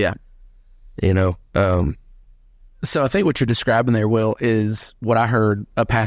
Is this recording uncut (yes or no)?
yes